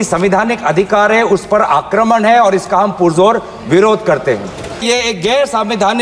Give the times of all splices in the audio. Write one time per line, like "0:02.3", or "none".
0:04.8